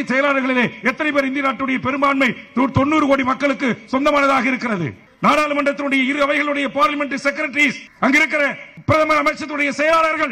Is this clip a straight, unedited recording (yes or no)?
yes